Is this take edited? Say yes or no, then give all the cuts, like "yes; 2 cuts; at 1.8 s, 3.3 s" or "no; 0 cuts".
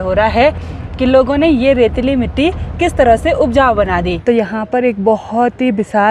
yes; 1 cut; at 4.2 s